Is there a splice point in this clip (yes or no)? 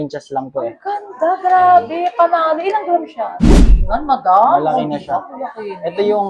yes